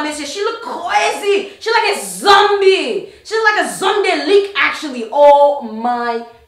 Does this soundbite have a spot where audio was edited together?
no; 0 cuts

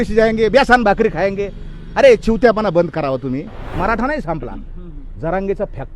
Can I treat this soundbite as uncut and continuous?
no; 1 cut; at 3.7 s

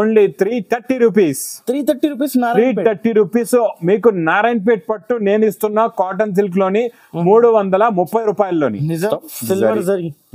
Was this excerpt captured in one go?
no; 1 cut; at 9.1 s

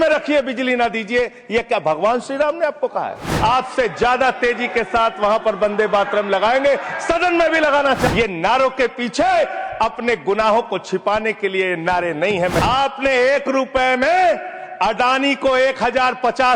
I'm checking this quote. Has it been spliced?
yes; 3 cuts; at 3.3 s, 8.1 s, 12.6 s

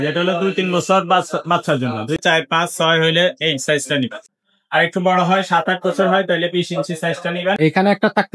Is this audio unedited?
no; 3 cuts; at 2.2 s, 4.2 s, 7.6 s

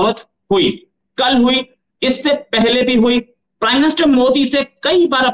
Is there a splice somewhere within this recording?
no; 0 cuts

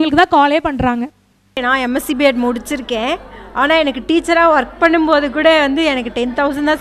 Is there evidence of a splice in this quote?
yes; 1 cut; at 1.6 s

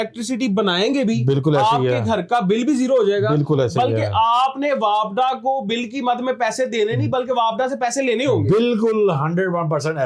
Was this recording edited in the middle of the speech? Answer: no; 0 cuts

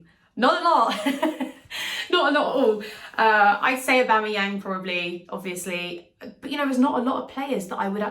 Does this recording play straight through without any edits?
yes; 0 cuts

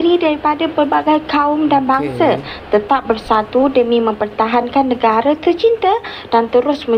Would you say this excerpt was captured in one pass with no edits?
yes; 0 cuts

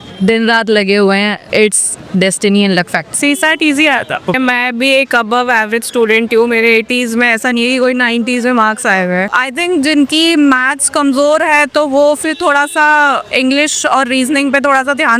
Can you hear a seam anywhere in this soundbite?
yes; 4 cuts; at 1.4 s, 3.0 s, 4.3 s, 9.3 s

